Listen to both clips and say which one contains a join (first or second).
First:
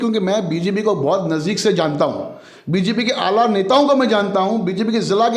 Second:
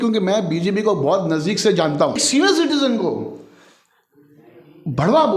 second